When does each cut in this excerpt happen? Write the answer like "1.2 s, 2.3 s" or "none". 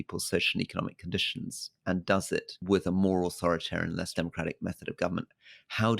2.5 s, 4.1 s